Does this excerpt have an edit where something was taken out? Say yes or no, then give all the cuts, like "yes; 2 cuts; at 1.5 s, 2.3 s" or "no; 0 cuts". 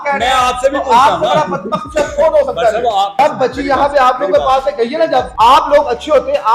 yes; 2 cuts; at 3.2 s, 5.3 s